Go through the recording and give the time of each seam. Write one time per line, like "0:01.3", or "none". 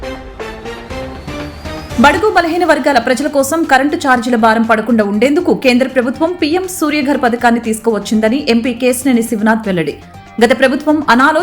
0:01.8